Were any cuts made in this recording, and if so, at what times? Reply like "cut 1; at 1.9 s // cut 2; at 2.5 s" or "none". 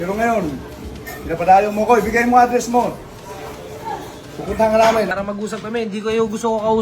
cut 1; at 5.1 s